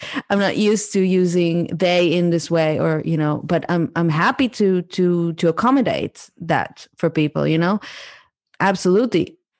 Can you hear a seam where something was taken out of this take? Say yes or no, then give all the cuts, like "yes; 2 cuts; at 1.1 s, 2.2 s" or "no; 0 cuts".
yes; 1 cut; at 8.4 s